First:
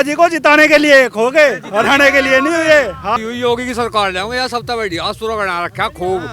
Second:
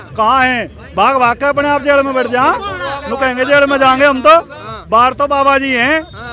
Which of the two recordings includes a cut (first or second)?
first